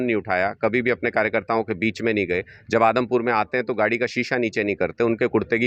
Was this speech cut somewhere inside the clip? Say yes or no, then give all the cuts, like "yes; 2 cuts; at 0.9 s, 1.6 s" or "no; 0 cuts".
no; 0 cuts